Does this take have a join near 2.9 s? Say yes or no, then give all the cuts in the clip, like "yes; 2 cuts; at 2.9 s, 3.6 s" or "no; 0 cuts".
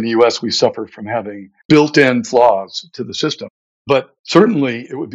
no; 1 cut; at 1.6 s